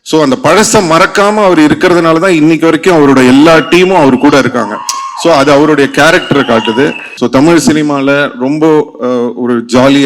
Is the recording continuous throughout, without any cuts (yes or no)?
no